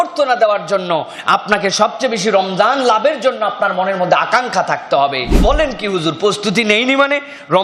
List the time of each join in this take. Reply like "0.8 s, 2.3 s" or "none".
5.4 s